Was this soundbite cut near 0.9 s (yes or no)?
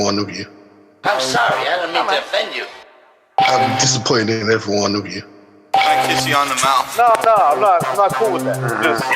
yes